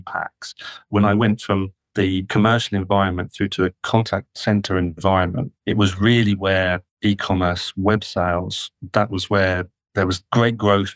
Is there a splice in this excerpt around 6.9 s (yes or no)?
yes